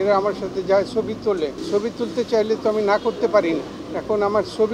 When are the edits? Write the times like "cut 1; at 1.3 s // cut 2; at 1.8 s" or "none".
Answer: cut 1; at 1.6 s // cut 2; at 3.8 s